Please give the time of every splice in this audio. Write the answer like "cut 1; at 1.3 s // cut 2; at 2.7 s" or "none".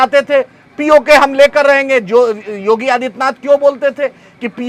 none